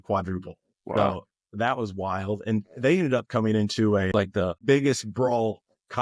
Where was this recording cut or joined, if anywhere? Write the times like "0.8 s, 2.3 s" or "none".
4.1 s